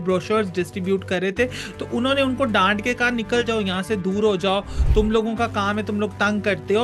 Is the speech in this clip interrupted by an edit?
no; 0 cuts

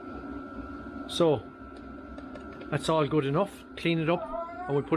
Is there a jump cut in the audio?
no; 0 cuts

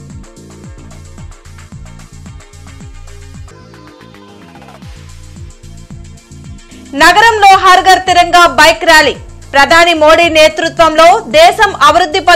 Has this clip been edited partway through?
no; 0 cuts

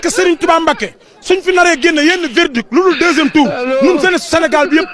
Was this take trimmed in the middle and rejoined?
no; 0 cuts

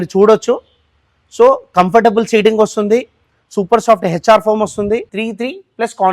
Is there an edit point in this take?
yes; 1 cut; at 5.2 s

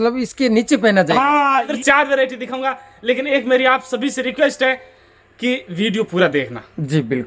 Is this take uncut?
no; 1 cut; at 1.7 s

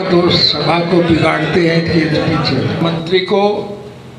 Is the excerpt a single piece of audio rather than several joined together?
no; 1 cut; at 2.8 s

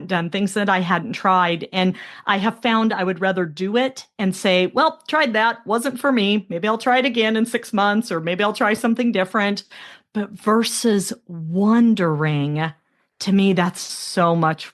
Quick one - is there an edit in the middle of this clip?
no; 0 cuts

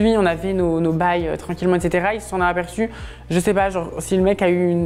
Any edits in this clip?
no; 0 cuts

